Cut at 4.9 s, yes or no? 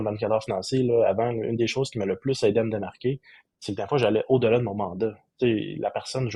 no